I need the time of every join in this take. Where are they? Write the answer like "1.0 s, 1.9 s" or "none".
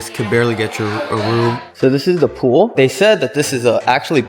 1.7 s, 2.7 s